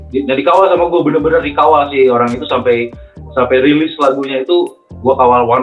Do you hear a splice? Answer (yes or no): no